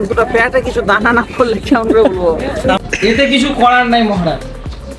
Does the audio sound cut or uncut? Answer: cut